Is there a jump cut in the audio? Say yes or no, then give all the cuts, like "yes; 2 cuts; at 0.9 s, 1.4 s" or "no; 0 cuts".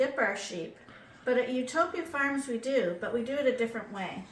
no; 0 cuts